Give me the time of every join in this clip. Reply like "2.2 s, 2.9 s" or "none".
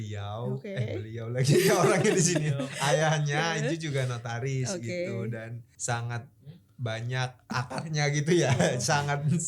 5.7 s, 7.5 s